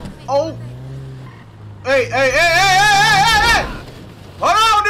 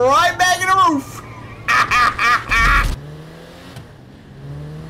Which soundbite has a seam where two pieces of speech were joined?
second; 1 cut; at 3.0 s

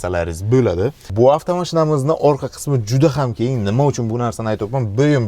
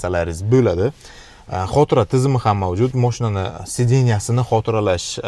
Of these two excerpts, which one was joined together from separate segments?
first; 1 cut; at 1.0 s

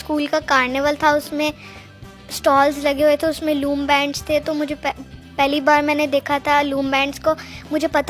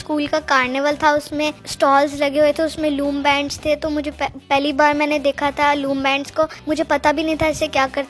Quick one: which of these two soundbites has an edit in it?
second; 3 cuts; at 1.6 s, 4.4 s, 6.6 s

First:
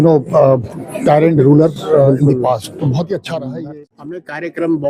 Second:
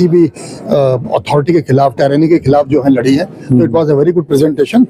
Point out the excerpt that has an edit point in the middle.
first; 1 cut; at 3.5 s

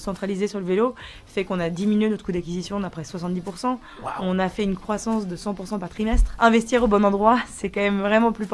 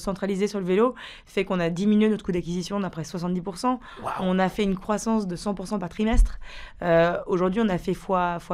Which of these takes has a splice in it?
first; 1 cut; at 6.3 s

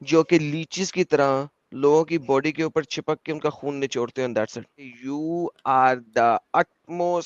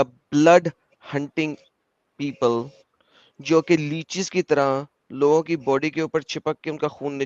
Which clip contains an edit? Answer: first; 1 cut; at 5.0 s

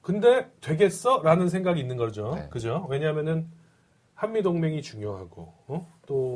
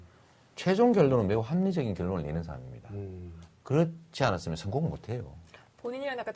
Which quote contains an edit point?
second; 1 cut; at 4.2 s

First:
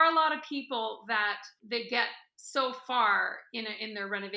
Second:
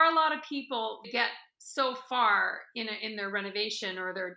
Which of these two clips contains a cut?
second; 1 cut; at 1.1 s

